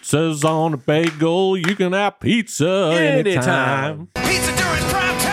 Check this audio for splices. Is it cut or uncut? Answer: cut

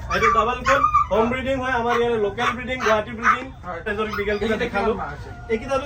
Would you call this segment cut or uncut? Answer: cut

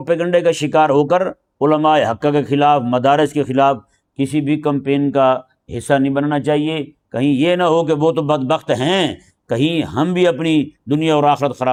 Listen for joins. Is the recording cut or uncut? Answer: uncut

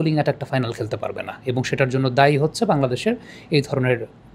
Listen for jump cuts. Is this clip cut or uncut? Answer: uncut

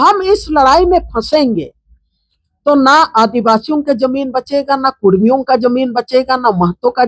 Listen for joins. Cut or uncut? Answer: uncut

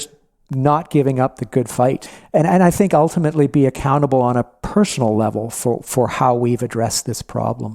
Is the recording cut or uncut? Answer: cut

